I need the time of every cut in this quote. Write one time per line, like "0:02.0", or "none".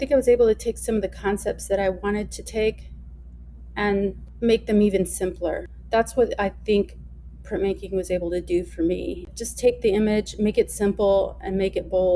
0:04.2
0:05.7
0:09.3